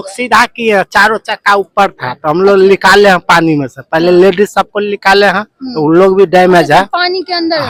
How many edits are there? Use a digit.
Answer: 0